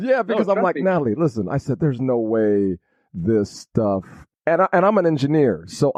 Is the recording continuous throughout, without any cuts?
yes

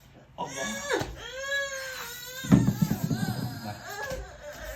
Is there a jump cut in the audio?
no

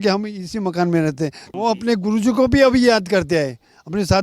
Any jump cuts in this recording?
yes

